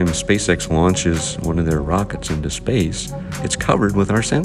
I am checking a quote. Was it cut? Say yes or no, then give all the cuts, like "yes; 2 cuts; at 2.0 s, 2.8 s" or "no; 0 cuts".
no; 0 cuts